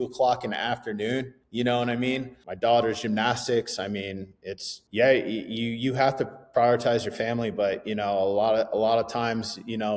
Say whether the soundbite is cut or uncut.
cut